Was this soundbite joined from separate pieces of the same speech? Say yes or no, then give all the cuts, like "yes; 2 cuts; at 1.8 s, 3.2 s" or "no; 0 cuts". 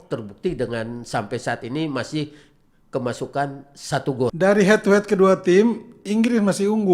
yes; 1 cut; at 4.3 s